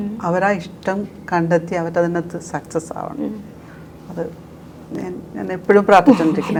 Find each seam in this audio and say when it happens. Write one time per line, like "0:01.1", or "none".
none